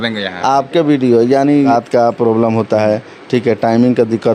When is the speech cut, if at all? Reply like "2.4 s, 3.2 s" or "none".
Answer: 1.7 s